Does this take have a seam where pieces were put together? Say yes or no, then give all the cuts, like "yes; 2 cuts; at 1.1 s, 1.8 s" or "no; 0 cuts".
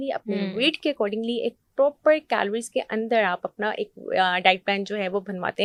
no; 0 cuts